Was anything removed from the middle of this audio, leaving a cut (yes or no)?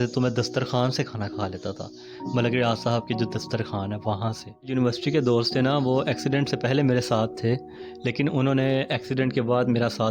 yes